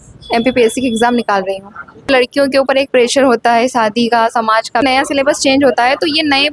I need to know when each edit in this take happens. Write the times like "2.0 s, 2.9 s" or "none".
2.0 s, 4.8 s